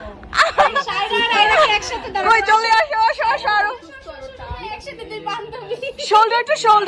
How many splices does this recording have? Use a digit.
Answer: 0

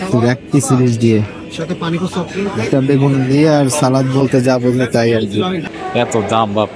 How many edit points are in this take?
1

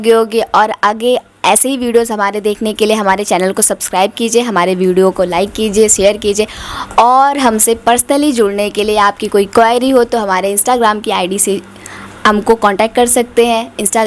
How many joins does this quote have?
0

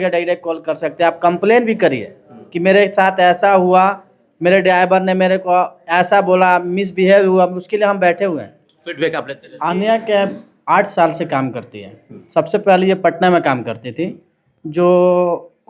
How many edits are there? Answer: 1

